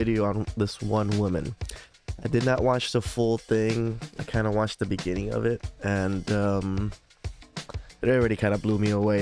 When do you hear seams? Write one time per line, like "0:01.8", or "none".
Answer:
none